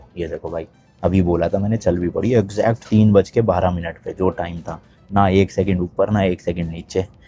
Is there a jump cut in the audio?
no; 0 cuts

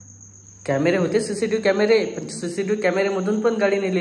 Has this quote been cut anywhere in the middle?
no; 0 cuts

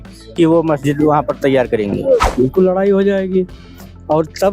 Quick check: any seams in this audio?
yes; 1 cut; at 2.3 s

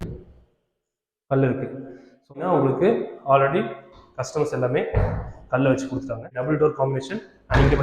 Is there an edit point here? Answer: yes; 2 cuts; at 2.4 s, 6.3 s

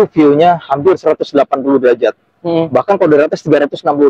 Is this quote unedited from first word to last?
yes; 0 cuts

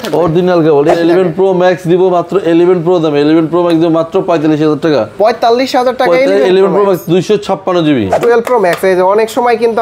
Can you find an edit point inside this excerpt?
yes; 2 cuts; at 1.0 s, 8.1 s

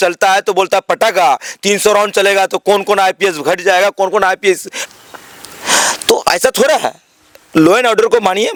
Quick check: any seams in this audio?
no; 0 cuts

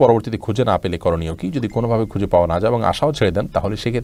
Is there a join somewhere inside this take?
no; 0 cuts

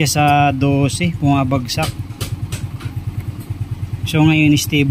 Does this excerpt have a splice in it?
no; 0 cuts

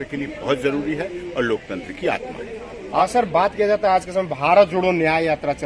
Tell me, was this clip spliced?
yes; 1 cut; at 3.0 s

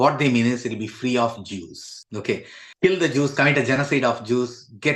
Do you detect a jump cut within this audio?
no; 0 cuts

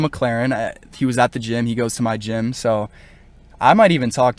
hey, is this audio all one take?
yes; 0 cuts

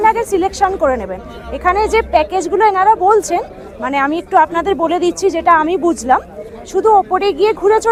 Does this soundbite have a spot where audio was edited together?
no; 0 cuts

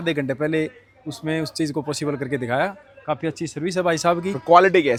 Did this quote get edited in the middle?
no; 0 cuts

